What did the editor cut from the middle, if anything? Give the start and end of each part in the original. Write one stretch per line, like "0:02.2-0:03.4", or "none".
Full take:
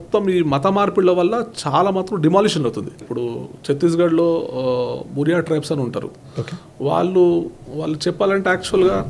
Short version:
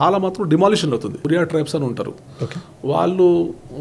0:02.9-0:05.2

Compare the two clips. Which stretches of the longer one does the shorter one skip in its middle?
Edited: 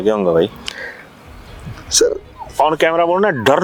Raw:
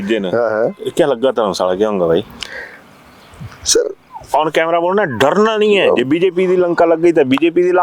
none

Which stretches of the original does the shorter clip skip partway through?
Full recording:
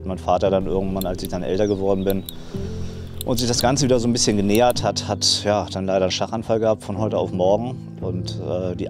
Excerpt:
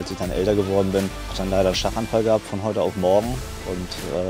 0:02.5-0:05.7

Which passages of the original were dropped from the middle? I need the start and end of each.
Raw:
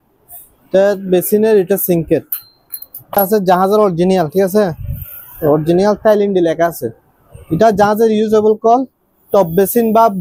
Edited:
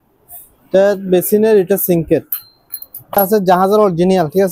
none

